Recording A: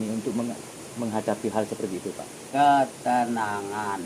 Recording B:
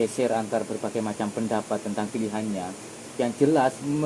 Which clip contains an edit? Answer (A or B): A